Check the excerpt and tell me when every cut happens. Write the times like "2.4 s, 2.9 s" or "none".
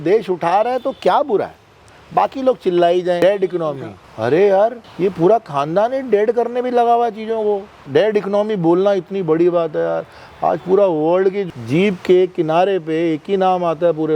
3.2 s, 7.8 s, 11.4 s